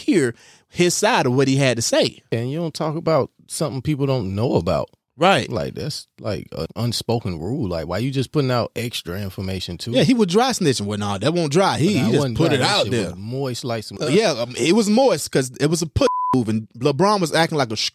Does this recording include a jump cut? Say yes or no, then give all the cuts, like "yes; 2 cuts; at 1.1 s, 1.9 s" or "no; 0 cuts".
yes; 3 cuts; at 2.3 s, 6.7 s, 14.0 s